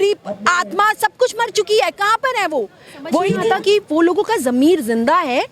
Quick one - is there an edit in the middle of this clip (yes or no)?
yes